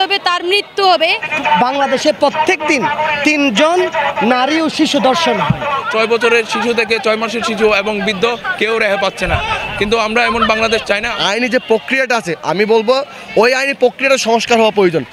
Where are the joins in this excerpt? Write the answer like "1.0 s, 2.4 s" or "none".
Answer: 1.3 s, 5.9 s, 11.1 s